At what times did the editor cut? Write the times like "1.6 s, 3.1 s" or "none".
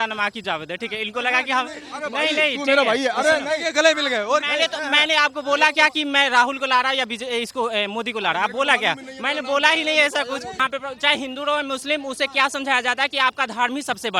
10.6 s